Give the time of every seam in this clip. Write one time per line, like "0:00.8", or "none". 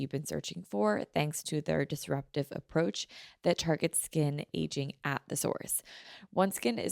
0:06.0